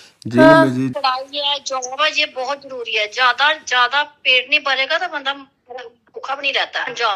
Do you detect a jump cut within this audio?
yes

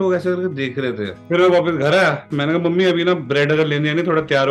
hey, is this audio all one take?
no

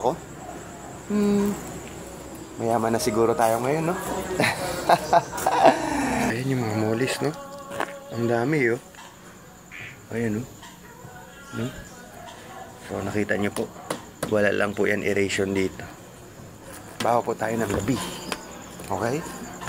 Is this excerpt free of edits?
no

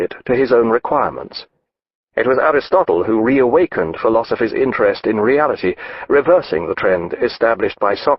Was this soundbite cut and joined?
no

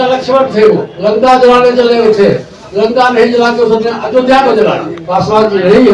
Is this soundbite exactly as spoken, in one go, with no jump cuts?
no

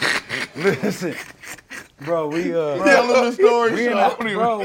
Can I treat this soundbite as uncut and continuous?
no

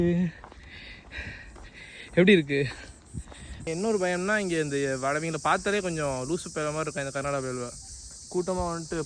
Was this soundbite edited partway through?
yes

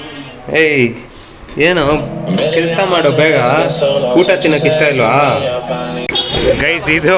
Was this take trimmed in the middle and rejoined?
yes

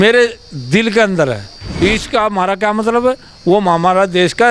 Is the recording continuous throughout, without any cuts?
no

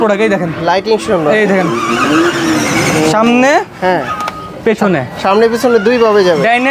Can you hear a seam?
no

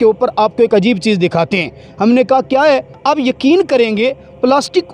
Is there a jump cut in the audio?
yes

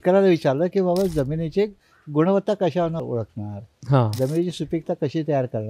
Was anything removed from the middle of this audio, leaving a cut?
yes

